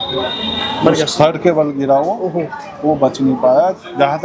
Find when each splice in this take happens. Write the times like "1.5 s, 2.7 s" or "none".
none